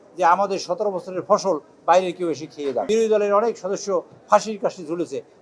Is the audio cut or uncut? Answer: cut